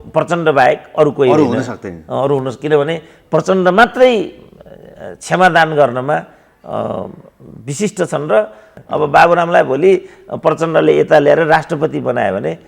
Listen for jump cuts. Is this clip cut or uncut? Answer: cut